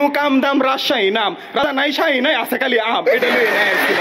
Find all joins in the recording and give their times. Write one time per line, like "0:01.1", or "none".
0:01.6